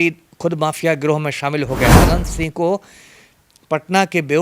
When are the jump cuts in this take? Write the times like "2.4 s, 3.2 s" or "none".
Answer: 2.0 s

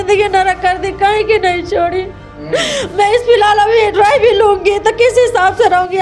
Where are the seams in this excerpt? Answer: none

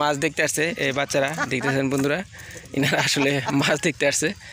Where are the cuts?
none

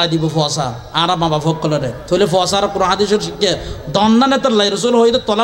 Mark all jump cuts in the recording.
2.0 s

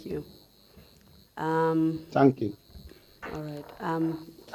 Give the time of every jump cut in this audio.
none

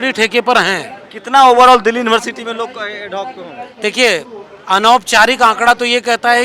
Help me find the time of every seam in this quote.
none

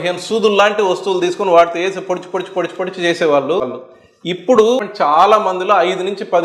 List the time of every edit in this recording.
3.8 s, 4.8 s

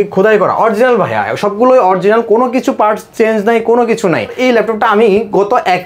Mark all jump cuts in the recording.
4.4 s

